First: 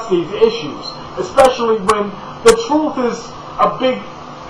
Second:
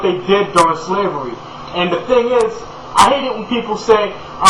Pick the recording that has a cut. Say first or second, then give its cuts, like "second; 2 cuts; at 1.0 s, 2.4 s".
first; 1 cut; at 2.2 s